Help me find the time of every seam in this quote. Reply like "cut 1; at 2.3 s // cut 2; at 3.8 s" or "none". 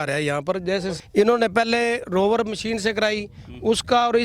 cut 1; at 0.9 s